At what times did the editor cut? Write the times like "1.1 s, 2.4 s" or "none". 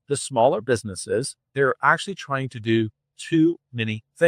1.5 s